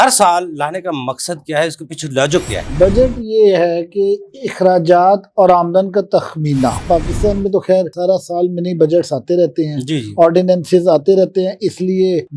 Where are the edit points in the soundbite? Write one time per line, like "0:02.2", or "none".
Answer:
0:02.6
0:06.8